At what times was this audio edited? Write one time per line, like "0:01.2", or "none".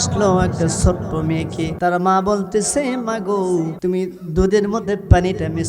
0:01.7
0:03.7